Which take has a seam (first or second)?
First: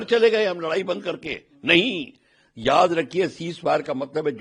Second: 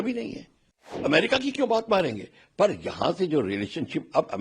second